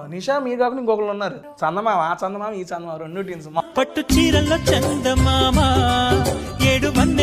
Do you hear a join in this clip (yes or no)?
yes